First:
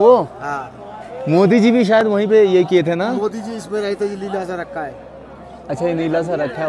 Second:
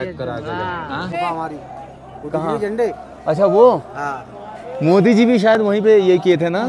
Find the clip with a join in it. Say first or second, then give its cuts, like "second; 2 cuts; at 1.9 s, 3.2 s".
second; 1 cut; at 1.1 s